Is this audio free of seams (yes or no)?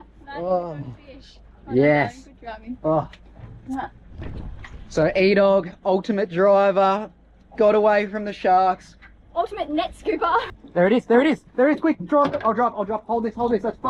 no